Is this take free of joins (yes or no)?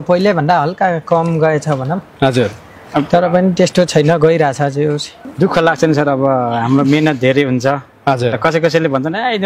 no